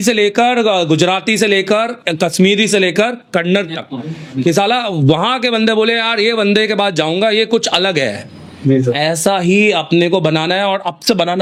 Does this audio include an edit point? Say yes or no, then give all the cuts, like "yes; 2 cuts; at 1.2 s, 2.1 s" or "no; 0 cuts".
no; 0 cuts